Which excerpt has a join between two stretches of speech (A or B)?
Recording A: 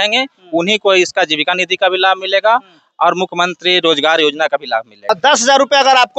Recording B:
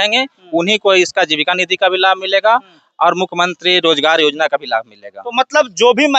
A